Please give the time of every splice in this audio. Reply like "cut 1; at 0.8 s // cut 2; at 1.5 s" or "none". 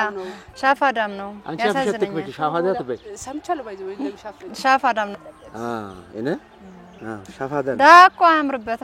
cut 1; at 5.2 s